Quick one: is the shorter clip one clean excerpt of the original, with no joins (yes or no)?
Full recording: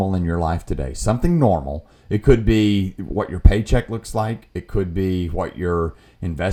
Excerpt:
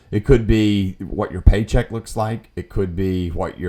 yes